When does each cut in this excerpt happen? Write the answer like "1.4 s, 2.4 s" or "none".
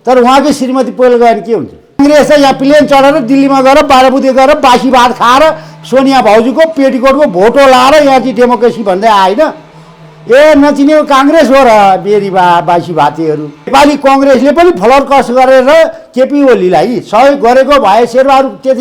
2.0 s, 13.7 s

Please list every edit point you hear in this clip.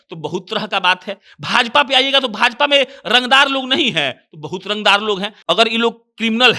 5.3 s

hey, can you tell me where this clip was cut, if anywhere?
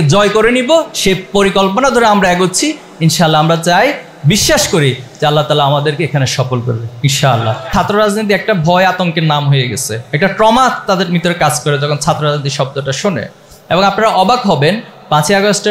7.7 s

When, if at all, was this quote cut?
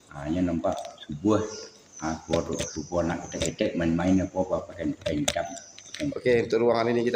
6.2 s

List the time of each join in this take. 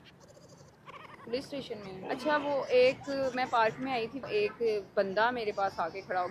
1.9 s

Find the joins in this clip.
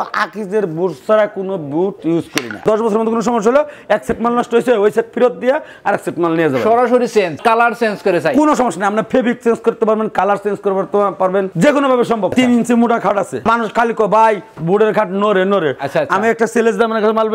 2.6 s, 7.4 s, 12.3 s, 13.4 s

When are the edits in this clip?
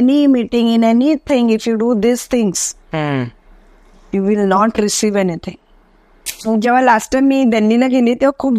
6.5 s

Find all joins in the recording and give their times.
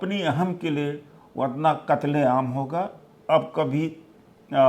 3.1 s

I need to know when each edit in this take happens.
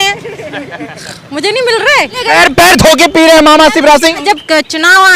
2.2 s, 4.2 s

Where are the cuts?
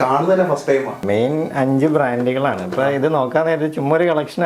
1.0 s

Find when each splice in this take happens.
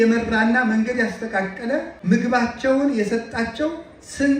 1.9 s

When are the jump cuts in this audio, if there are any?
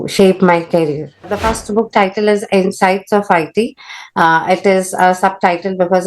1.4 s

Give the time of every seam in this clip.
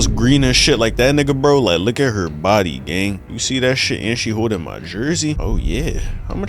5.4 s

